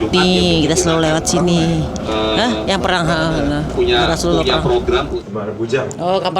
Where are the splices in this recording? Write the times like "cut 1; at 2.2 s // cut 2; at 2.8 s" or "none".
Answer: cut 1; at 5.2 s

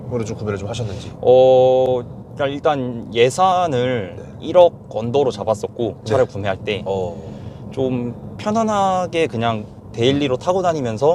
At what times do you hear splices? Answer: none

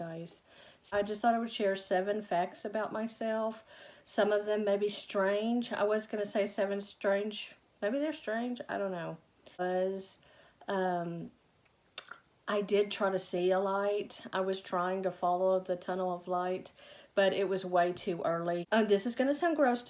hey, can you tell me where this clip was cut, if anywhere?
cut 1; at 0.9 s // cut 2; at 9.6 s // cut 3; at 18.6 s

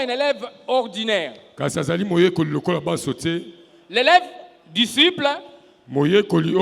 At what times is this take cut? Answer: none

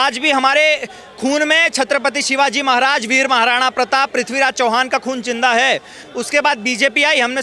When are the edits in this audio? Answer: cut 1; at 6.0 s

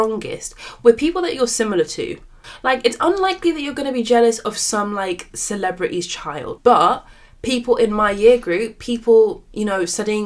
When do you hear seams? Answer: none

